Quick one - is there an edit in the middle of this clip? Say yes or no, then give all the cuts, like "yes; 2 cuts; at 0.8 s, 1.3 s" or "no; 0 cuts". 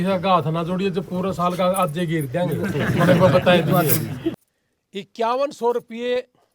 yes; 1 cut; at 4.3 s